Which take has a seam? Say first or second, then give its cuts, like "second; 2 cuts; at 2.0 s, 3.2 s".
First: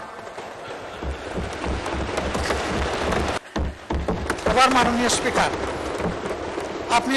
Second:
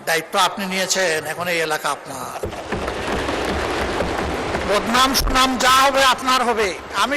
first; 1 cut; at 3.4 s